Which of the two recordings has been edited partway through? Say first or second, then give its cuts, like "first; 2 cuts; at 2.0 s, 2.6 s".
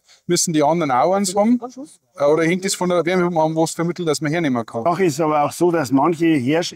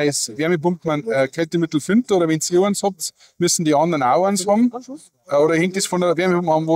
first; 1 cut; at 4.8 s